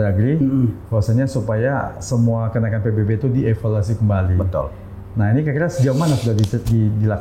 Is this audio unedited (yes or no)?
yes